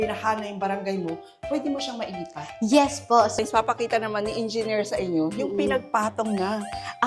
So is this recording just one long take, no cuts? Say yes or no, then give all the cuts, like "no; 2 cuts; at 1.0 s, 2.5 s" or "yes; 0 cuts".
no; 1 cut; at 3.4 s